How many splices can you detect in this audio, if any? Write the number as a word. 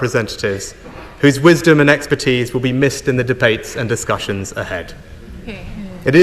zero